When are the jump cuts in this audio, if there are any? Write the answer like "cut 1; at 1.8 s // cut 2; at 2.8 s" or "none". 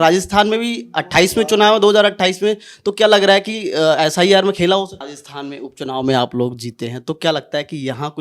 cut 1; at 5.0 s